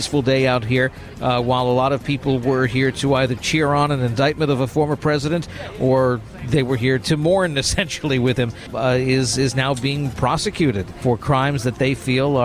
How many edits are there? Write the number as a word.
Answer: three